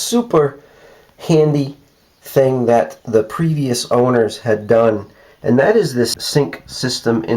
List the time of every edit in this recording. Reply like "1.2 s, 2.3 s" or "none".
6.2 s